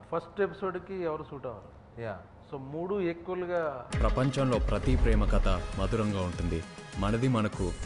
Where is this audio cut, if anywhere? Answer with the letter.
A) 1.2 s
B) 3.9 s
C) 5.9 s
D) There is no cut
B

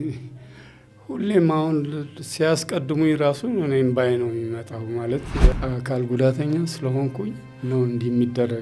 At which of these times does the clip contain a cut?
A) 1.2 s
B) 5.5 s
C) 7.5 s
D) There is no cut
B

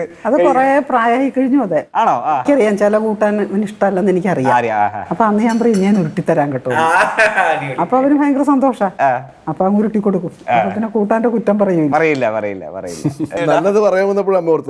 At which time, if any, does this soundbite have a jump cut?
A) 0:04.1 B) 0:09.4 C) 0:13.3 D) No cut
C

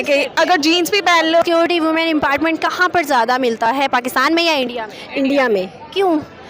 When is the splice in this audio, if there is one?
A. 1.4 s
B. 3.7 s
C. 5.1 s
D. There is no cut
A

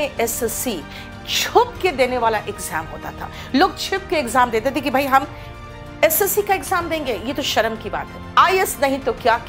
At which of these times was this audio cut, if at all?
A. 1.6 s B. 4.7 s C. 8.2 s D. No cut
C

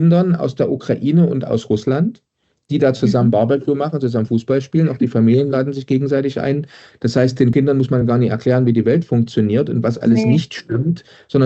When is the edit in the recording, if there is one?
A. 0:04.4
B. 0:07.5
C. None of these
B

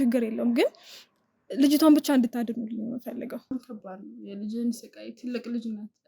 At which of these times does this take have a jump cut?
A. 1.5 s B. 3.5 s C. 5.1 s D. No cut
B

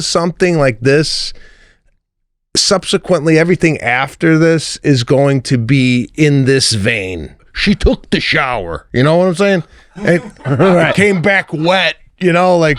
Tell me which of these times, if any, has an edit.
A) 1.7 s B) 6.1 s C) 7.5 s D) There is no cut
C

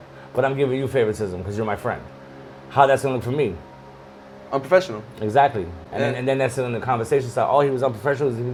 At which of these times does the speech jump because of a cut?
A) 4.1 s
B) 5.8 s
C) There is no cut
C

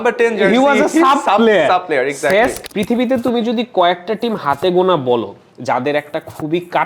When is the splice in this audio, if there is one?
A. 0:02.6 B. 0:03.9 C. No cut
A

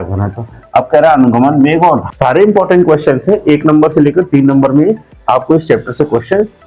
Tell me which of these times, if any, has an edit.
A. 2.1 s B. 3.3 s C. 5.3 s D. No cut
A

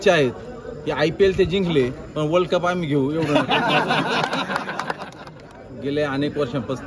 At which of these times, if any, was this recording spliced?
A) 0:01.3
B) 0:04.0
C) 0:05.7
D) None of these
C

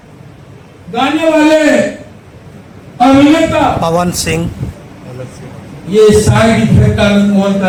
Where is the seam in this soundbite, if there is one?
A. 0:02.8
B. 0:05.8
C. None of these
C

